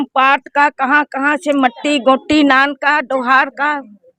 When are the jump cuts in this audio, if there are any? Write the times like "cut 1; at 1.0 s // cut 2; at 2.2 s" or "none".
none